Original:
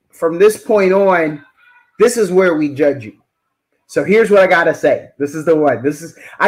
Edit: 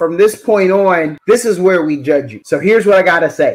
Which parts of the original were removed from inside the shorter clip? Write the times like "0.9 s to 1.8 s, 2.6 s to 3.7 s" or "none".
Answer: 1.4 s to 1.9 s, 3.1 s to 3.8 s